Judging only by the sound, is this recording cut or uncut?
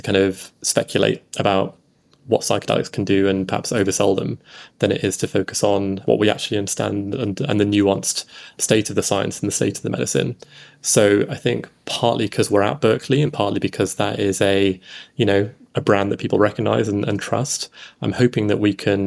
cut